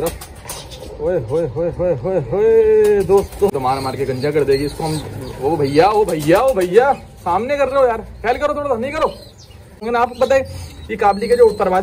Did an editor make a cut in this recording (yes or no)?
yes